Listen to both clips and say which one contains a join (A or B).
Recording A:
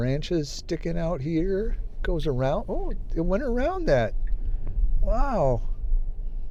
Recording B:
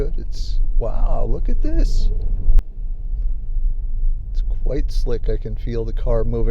B